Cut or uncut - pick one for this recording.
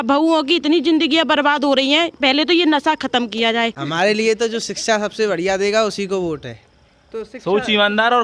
cut